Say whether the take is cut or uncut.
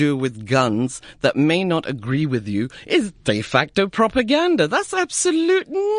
uncut